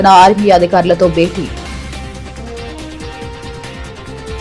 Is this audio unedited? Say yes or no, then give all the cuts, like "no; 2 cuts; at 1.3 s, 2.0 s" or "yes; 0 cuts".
no; 2 cuts; at 1.5 s, 3.3 s